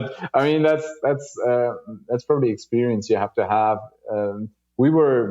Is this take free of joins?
yes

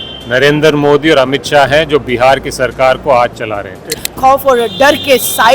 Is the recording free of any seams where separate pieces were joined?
no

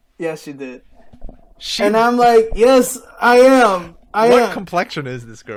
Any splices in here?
no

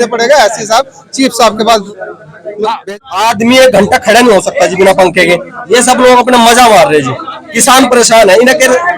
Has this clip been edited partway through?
yes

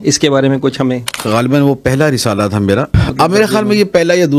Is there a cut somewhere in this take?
yes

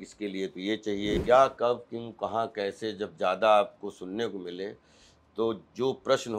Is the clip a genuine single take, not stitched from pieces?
no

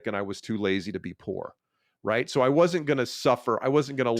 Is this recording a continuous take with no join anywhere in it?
yes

